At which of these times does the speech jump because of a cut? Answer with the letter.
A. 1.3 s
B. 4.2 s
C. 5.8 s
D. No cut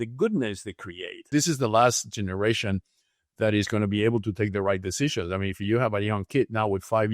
A